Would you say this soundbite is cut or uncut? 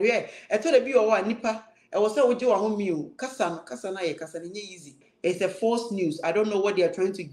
cut